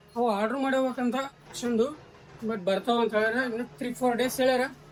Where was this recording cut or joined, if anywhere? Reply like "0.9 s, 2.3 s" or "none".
none

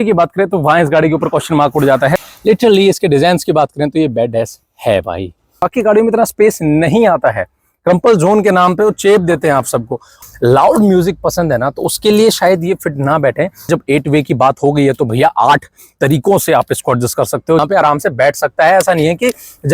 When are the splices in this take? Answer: 2.2 s, 5.7 s, 10.2 s, 13.7 s, 17.6 s

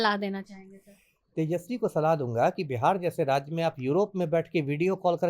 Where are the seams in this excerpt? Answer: none

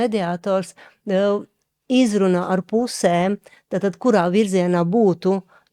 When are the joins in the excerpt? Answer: none

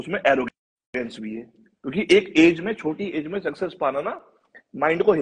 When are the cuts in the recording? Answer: none

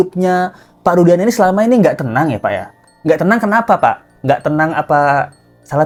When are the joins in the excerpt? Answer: none

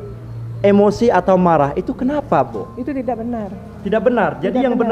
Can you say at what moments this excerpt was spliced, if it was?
none

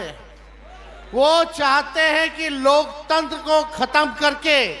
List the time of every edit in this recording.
none

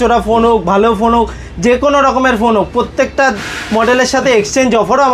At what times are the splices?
none

